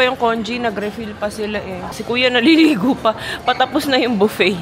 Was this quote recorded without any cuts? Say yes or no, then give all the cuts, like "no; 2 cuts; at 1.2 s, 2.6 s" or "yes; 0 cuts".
no; 1 cut; at 1.9 s